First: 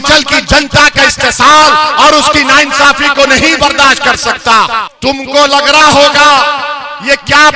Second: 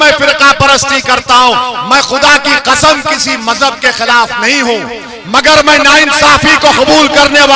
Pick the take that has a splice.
first; 1 cut; at 4.9 s

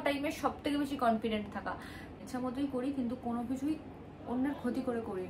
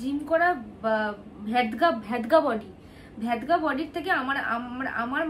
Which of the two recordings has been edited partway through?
first; 1 cut; at 2.2 s

